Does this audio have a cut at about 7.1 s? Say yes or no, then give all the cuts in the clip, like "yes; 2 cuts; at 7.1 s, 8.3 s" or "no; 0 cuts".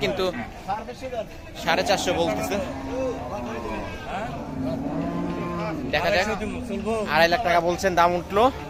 no; 0 cuts